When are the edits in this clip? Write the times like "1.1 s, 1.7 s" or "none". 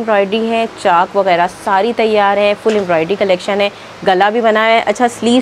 none

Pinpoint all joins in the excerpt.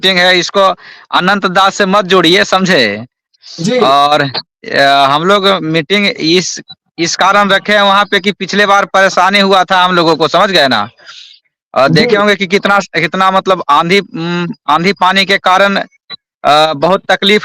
none

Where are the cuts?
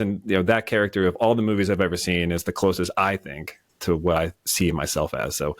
3.7 s

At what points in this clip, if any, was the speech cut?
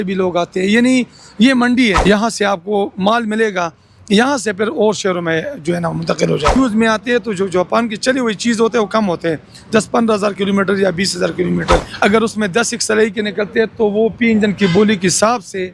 2.0 s, 6.5 s, 11.9 s

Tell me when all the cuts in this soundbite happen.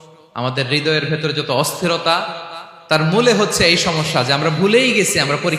none

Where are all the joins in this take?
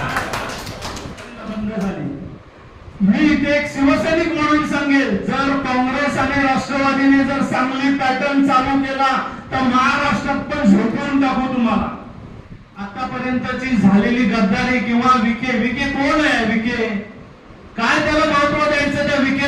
1.4 s, 13.0 s

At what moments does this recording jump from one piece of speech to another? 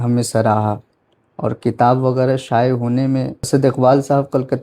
3.5 s

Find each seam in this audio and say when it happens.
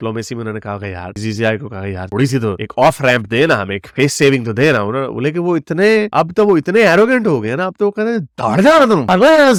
none

